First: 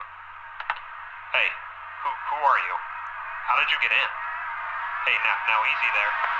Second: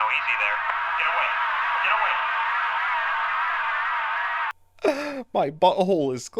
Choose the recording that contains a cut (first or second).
second